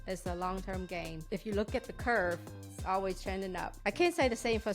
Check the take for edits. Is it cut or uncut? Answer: cut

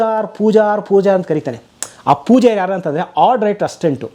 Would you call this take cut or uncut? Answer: uncut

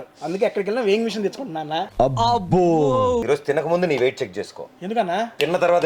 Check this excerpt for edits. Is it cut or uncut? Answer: cut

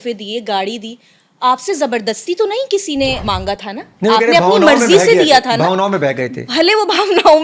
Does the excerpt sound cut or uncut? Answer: cut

